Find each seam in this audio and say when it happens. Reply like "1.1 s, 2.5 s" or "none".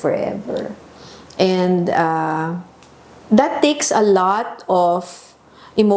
none